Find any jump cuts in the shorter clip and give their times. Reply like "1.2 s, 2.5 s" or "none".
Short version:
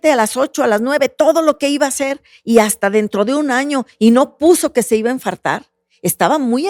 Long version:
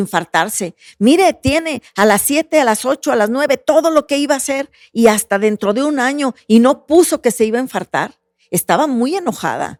none